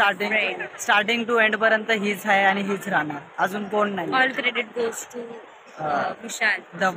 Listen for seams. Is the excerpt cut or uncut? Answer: uncut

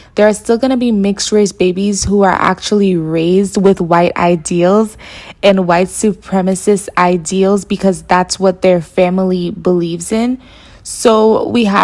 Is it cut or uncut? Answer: uncut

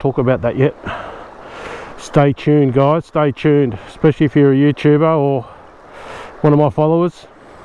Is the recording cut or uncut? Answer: uncut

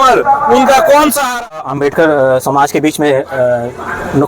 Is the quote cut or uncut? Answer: cut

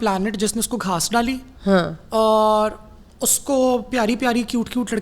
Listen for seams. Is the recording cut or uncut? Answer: uncut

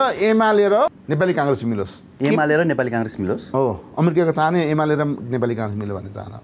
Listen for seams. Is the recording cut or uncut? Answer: cut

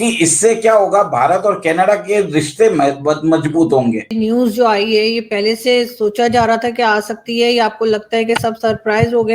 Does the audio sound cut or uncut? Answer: cut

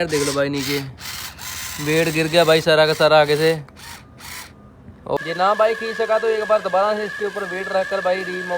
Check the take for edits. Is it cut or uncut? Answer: cut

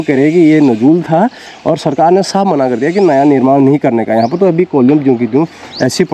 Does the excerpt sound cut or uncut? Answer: uncut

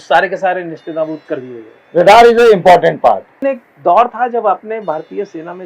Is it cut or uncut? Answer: cut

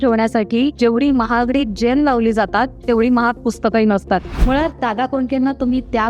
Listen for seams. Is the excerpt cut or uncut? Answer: cut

